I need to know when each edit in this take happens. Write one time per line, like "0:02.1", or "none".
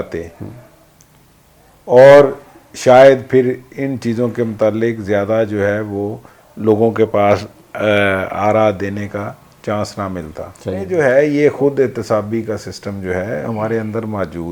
0:10.9